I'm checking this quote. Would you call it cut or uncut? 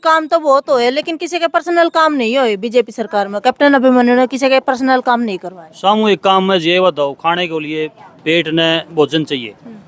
uncut